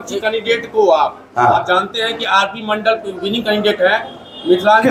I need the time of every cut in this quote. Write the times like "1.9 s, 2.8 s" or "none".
none

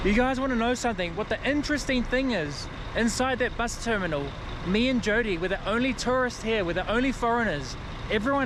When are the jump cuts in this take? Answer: none

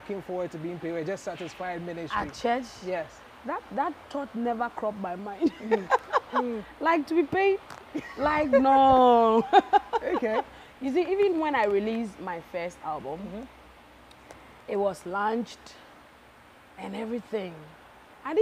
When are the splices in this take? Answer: none

